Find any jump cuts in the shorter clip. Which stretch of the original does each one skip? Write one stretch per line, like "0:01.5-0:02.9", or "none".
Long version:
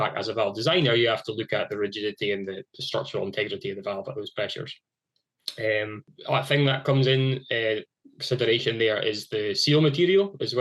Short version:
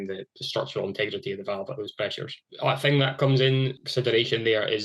0:04.8-0:06.1
0:07.4-0:08.1